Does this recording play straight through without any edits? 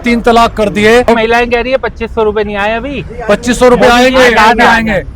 no; 1 cut; at 1.1 s

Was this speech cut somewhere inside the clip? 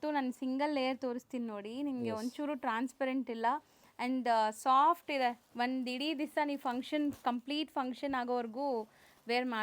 no; 0 cuts

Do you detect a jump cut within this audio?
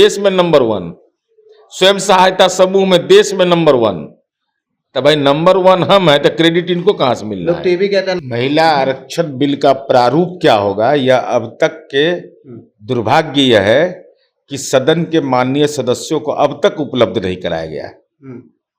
yes; 1 cut; at 8.2 s

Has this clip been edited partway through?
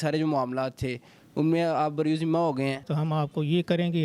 yes; 1 cut; at 2.9 s

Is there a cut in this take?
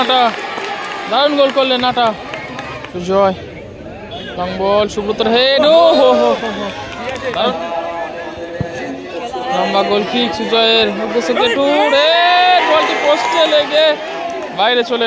yes; 2 cuts; at 2.8 s, 7.5 s

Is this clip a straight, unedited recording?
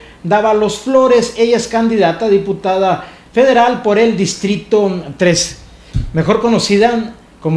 no; 1 cut; at 2.2 s

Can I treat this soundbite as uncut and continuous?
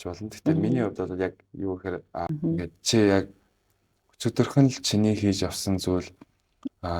no; 1 cut; at 2.3 s

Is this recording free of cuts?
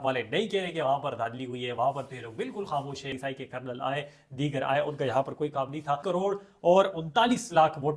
no; 2 cuts; at 3.1 s, 6.0 s

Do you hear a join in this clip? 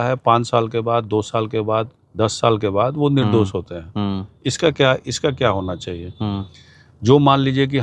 no; 0 cuts

